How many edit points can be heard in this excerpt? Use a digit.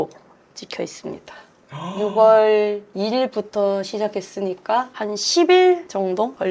0